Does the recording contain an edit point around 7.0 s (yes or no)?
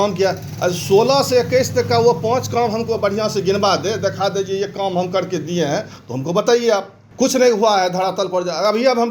yes